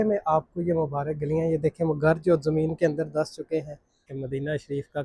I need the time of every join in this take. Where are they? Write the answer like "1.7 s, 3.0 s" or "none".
4.1 s